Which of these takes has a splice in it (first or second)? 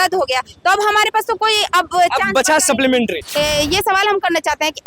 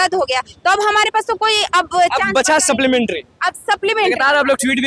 first